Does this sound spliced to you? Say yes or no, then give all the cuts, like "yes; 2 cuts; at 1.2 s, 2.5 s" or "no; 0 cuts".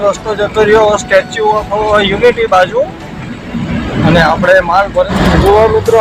yes; 1 cut; at 5.1 s